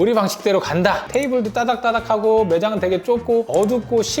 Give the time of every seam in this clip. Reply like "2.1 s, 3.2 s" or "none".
1.1 s